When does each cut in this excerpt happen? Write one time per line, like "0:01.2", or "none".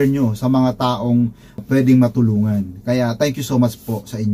0:01.5